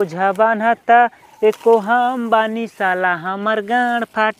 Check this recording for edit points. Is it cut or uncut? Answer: uncut